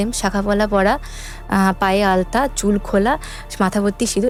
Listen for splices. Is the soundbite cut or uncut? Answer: uncut